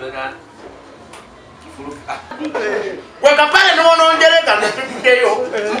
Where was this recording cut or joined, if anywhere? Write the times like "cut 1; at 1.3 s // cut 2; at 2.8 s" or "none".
cut 1; at 2.4 s